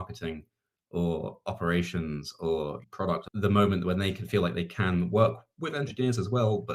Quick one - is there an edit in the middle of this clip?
yes; 1 cut; at 2.8 s

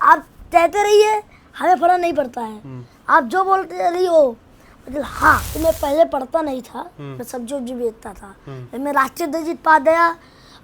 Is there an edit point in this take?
yes; 1 cut; at 5.5 s

